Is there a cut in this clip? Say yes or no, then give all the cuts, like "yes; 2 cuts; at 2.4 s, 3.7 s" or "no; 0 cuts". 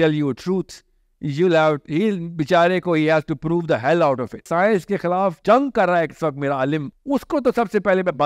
yes; 3 cuts; at 4.5 s, 5.4 s, 6.9 s